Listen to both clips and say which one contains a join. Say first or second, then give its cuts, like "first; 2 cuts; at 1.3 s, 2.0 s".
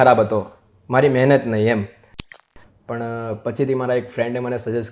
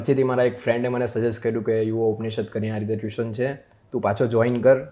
first; 1 cut; at 2.3 s